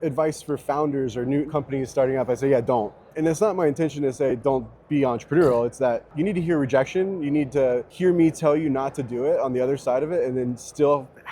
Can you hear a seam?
yes; 4 cuts; at 1.5 s, 3.1 s, 6.1 s, 7.9 s

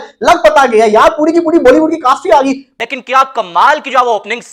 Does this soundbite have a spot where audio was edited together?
yes; 1 cut; at 2.7 s

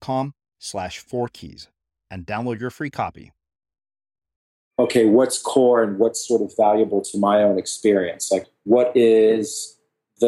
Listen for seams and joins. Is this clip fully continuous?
no; 2 cuts; at 4.6 s, 8.5 s

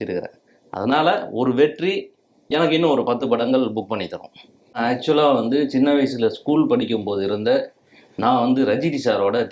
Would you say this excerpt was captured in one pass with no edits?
no; 1 cut; at 4.8 s

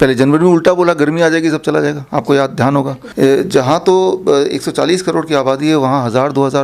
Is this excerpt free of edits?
no; 1 cut; at 3.0 s

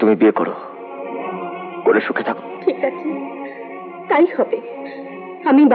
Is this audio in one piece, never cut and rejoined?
yes; 0 cuts

